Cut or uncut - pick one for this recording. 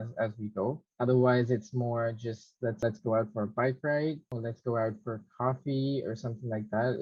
uncut